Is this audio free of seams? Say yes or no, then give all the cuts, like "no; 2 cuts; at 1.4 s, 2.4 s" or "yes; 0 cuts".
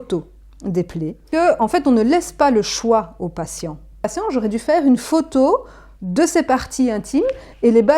no; 2 cuts; at 1.3 s, 4.1 s